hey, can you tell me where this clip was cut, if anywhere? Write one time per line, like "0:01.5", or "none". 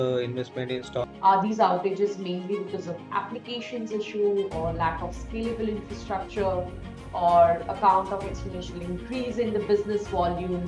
0:01.1